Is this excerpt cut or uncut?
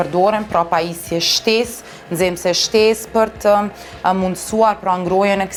uncut